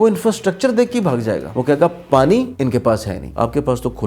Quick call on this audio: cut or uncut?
cut